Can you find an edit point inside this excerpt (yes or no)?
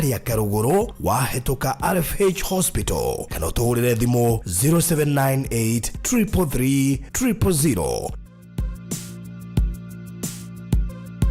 yes